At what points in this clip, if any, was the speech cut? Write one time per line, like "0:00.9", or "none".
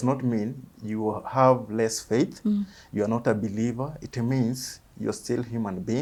none